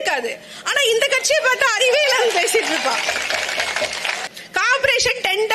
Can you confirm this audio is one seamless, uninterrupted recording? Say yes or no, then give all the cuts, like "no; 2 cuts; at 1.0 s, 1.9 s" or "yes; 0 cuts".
no; 1 cut; at 4.3 s